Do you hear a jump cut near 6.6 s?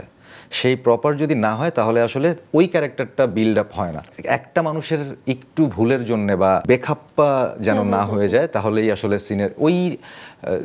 yes; 2 cuts; at 4.0 s, 6.6 s

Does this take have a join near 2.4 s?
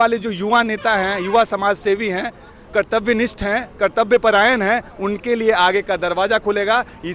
no; 0 cuts

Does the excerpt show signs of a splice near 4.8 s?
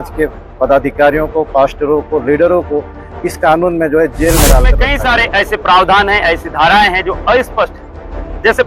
yes; 1 cut; at 4.8 s

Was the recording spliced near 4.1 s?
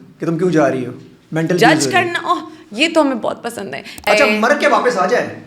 yes; 1 cut; at 4.1 s

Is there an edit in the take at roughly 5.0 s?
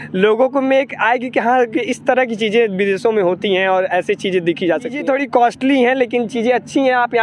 yes; 1 cut; at 5.0 s

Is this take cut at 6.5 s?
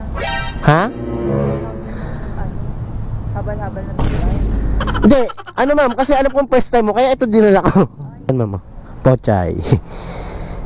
no; 1 cut; at 8.3 s

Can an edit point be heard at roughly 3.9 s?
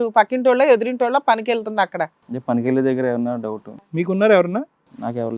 yes; 1 cut; at 3.9 s

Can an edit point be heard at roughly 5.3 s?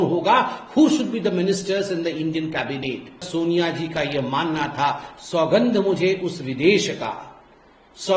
no; 1 cut; at 3.3 s

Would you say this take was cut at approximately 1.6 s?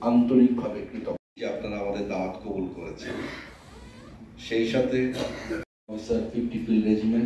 yes; 2 cuts; at 1.6 s, 5.8 s

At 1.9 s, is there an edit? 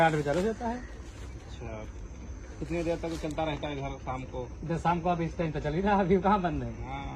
yes; 1 cut; at 1.9 s

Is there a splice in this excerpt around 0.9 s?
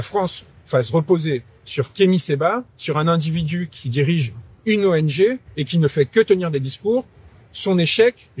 no; 0 cuts

